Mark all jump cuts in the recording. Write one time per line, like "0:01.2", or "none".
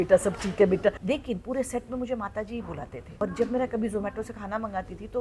0:01.0
0:03.0